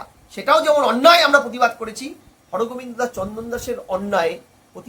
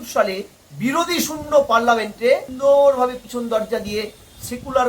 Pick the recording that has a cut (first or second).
second